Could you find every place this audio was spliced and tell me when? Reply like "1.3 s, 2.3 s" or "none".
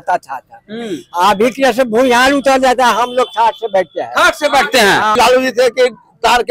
5.1 s